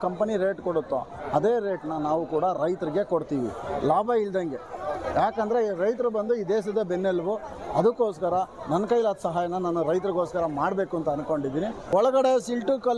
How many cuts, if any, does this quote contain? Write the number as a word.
one